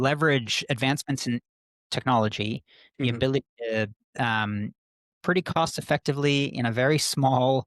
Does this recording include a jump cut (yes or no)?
yes